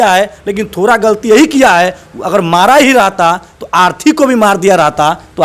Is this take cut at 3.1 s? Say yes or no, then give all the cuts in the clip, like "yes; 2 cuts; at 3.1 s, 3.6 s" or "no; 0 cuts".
no; 0 cuts